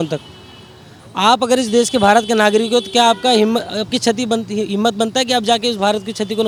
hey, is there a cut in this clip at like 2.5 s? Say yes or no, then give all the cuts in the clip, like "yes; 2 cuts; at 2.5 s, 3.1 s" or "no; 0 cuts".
no; 0 cuts